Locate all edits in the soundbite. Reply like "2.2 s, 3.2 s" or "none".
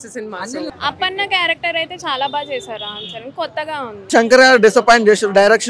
0.7 s, 4.1 s